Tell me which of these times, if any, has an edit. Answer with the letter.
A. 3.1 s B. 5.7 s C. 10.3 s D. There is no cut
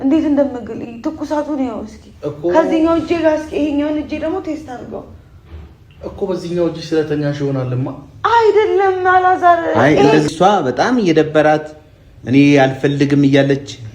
C